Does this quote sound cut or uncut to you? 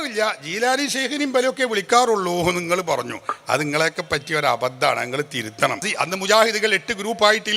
cut